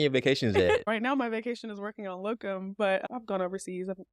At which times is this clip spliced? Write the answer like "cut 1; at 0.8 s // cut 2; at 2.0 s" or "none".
cut 1; at 0.9 s // cut 2; at 3.0 s